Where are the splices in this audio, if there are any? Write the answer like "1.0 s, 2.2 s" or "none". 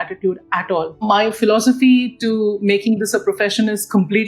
1.0 s